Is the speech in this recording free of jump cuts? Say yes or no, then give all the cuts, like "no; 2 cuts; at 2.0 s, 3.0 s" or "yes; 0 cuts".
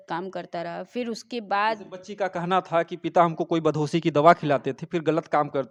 yes; 0 cuts